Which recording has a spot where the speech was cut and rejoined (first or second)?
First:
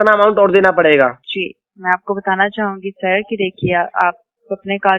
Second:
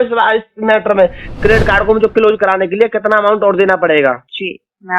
second